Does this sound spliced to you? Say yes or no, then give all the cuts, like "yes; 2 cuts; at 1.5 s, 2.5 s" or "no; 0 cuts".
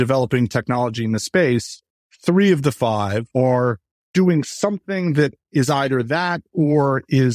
yes; 1 cut; at 3.3 s